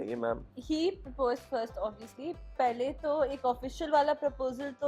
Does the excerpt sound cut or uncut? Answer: uncut